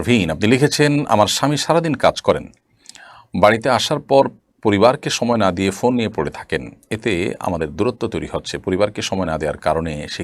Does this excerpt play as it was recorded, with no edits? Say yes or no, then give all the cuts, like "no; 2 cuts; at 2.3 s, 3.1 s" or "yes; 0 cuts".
yes; 0 cuts